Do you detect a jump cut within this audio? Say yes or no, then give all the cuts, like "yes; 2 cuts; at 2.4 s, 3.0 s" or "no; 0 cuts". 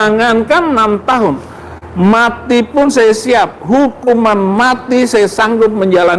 no; 0 cuts